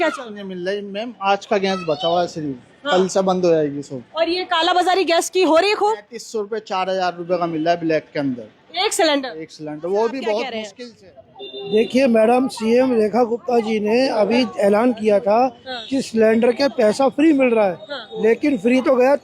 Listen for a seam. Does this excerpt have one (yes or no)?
yes